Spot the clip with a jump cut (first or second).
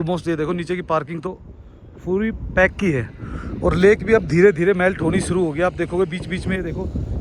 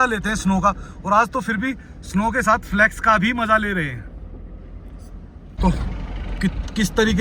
second